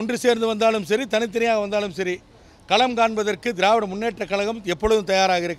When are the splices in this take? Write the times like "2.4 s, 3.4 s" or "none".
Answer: none